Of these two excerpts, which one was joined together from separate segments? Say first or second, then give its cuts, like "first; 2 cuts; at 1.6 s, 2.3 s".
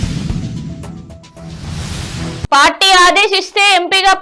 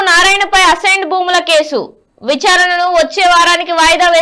first; 1 cut; at 2.5 s